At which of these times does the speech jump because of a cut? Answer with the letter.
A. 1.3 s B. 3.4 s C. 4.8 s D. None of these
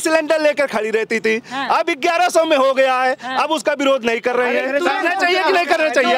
D